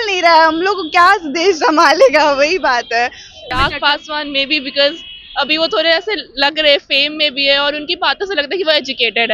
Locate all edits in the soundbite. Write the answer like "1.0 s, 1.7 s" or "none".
3.5 s